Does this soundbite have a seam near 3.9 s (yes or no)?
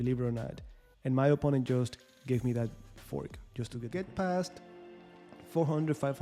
yes